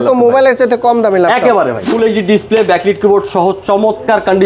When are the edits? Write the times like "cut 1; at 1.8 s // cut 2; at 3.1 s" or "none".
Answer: cut 1; at 1.9 s